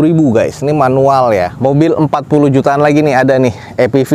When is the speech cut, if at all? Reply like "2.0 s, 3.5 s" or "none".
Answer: 1.5 s